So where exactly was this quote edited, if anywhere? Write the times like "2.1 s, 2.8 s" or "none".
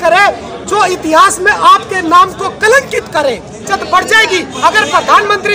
3.7 s